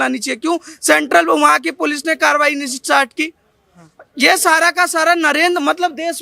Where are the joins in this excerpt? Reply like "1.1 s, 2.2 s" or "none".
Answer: none